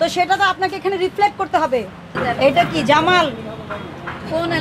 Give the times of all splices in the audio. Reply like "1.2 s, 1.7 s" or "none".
2.1 s